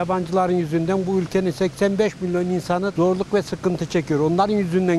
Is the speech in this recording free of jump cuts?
no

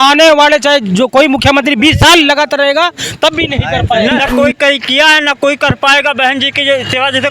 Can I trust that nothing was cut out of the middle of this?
no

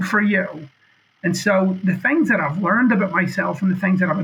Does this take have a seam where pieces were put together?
no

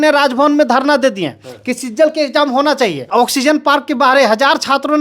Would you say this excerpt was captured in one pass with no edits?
no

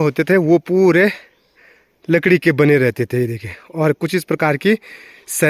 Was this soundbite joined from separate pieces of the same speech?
no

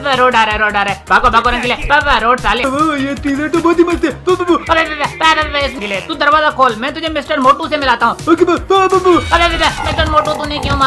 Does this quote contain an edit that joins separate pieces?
yes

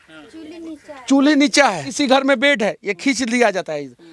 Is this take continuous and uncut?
no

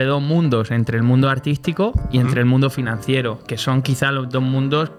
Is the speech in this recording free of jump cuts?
yes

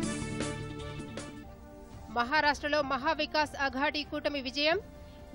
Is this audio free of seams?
no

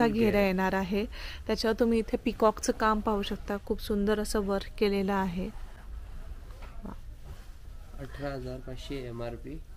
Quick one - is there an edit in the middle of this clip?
no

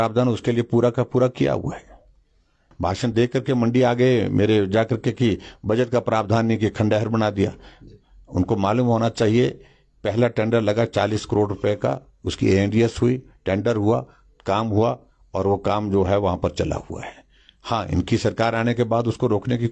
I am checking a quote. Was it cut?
yes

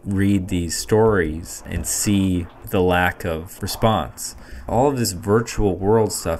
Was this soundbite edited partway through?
yes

